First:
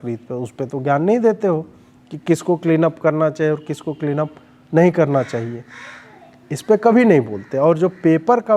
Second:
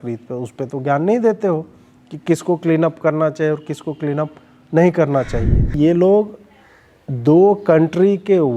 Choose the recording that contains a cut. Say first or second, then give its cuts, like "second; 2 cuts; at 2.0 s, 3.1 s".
second; 1 cut; at 5.7 s